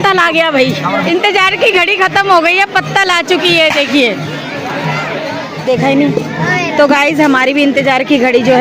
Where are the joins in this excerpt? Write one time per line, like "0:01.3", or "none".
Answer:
none